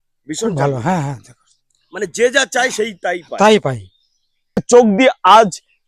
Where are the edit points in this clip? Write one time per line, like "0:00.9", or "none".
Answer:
0:04.6